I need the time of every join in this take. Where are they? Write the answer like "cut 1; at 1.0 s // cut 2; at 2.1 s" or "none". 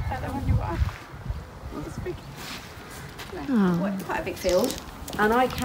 cut 1; at 4.1 s